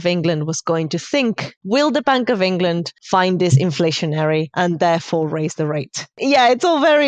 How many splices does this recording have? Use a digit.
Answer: 4